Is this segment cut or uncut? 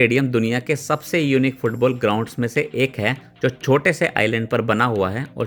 uncut